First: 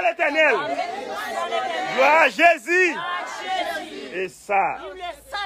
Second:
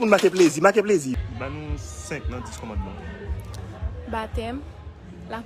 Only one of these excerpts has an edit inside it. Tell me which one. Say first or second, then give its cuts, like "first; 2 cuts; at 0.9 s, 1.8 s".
second; 1 cut; at 1.1 s